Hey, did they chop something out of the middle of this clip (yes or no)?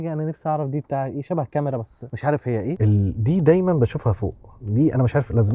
yes